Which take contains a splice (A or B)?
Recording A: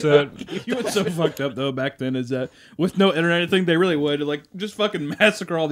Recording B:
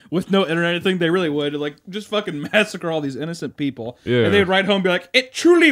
A